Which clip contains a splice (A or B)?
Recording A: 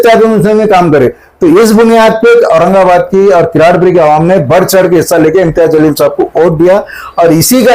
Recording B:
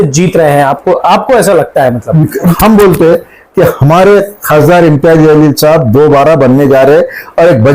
B